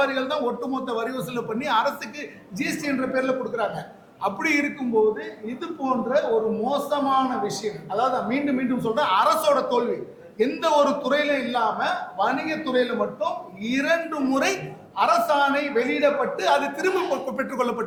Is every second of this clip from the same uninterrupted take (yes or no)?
yes